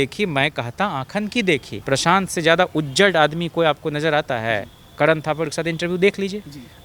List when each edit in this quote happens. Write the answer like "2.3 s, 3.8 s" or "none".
1.7 s